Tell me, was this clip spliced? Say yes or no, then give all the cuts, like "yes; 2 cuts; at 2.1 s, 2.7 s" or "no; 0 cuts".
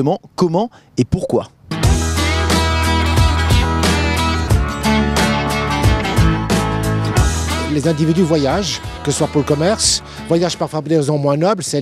yes; 1 cut; at 6.9 s